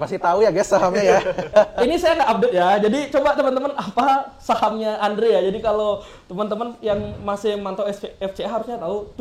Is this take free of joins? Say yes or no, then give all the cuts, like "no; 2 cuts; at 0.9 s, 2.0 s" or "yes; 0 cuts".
yes; 0 cuts